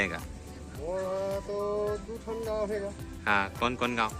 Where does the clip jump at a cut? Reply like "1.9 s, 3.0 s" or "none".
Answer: none